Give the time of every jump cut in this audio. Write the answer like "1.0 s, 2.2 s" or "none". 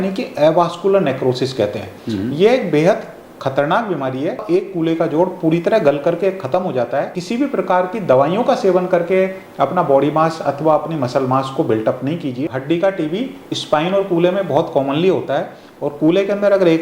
4.4 s, 7.2 s, 12.4 s